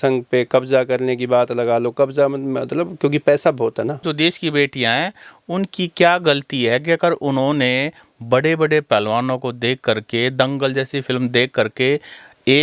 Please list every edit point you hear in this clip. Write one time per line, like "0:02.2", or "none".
0:04.0